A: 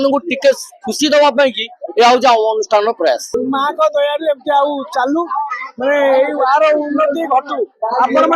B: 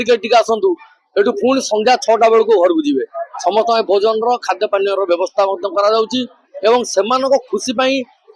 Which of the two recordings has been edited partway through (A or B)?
A